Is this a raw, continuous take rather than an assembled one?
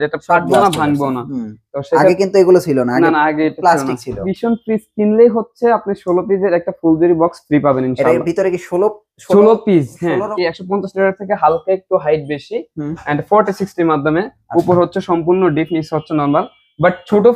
no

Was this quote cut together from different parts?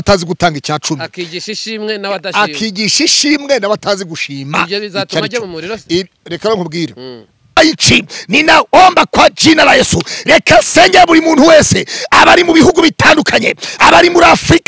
yes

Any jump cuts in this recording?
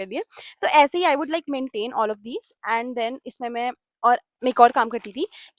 no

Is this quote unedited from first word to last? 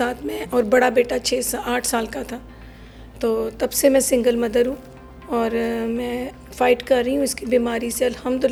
yes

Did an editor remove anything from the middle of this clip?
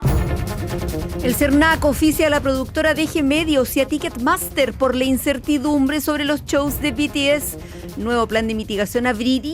yes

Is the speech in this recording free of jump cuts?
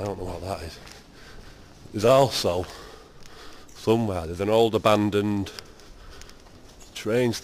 yes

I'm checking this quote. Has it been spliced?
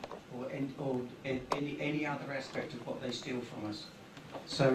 yes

